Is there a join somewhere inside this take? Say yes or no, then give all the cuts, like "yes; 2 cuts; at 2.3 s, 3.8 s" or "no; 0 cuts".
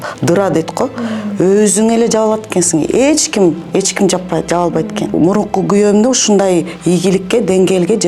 yes; 1 cut; at 5.1 s